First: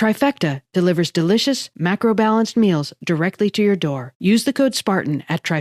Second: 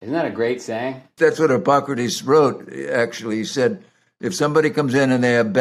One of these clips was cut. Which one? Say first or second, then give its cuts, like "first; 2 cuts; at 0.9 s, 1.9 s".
second; 1 cut; at 1.1 s